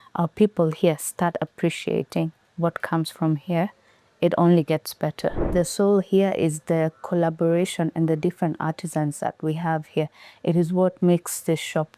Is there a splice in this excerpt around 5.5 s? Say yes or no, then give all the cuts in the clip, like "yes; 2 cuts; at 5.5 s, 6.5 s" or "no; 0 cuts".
yes; 1 cut; at 5.5 s